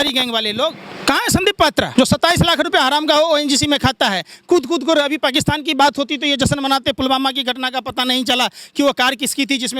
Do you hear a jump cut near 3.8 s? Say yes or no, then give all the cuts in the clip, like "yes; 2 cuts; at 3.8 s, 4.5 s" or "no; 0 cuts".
no; 2 cuts; at 0.9 s, 1.9 s